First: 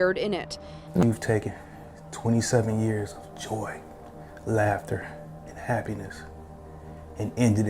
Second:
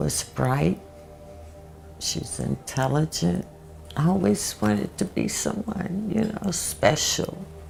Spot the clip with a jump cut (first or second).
first